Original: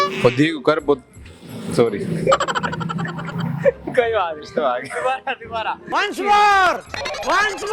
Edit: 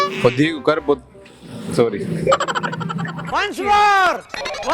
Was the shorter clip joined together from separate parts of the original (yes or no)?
yes